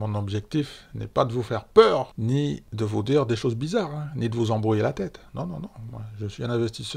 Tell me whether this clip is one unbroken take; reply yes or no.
yes